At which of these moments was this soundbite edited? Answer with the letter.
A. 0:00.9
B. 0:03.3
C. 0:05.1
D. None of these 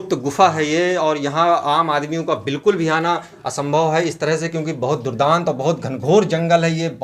D